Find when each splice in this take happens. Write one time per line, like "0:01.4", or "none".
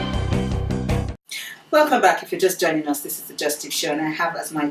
0:01.1